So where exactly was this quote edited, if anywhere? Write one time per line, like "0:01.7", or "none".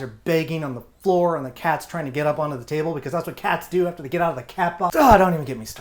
0:04.9